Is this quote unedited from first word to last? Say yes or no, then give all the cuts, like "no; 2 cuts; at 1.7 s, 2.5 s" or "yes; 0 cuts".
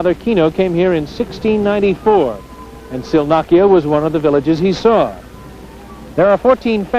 no; 1 cut; at 2.0 s